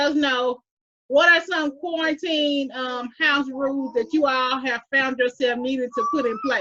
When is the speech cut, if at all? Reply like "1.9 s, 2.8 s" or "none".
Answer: none